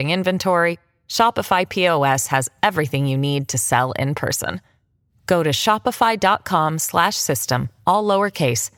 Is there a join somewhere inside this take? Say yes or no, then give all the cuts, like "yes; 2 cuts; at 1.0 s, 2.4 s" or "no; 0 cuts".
no; 0 cuts